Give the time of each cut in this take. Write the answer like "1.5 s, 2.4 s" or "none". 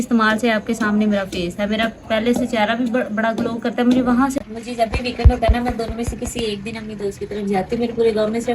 4.4 s